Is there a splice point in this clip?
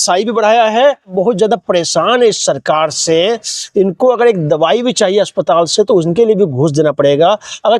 yes; 1 cut; at 1.1 s

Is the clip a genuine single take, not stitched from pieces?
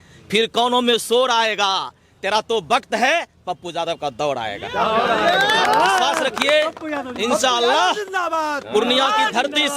yes; 0 cuts

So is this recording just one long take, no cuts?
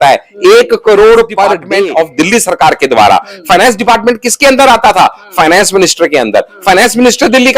no; 1 cut; at 1.6 s

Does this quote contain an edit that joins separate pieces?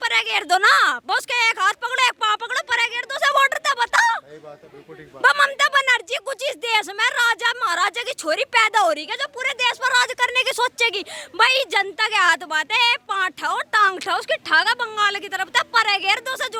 no; 0 cuts

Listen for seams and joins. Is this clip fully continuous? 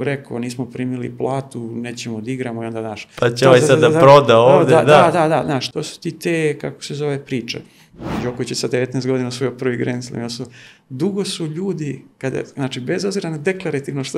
no; 2 cuts; at 5.6 s, 8.1 s

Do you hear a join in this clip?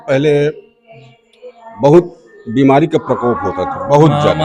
no; 0 cuts

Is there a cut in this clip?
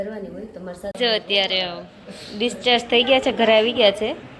yes; 1 cut; at 1.0 s

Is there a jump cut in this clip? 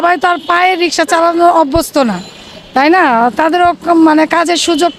no; 0 cuts

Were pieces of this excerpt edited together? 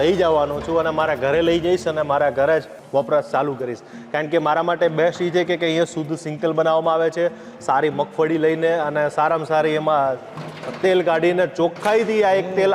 yes; 1 cut; at 2.8 s

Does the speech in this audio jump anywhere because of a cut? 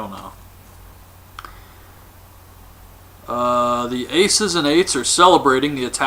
no; 0 cuts

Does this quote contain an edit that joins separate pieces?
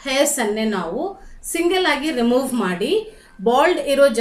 no; 0 cuts

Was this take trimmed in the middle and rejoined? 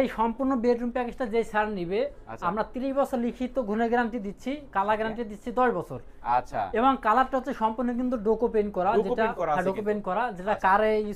no; 0 cuts

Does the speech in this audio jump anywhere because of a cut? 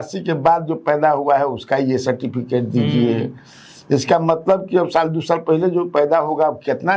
no; 0 cuts

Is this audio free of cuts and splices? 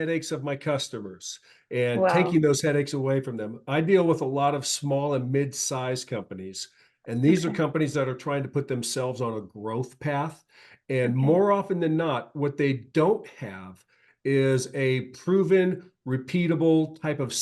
yes; 0 cuts

